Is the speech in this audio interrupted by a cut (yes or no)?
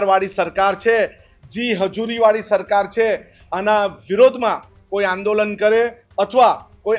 no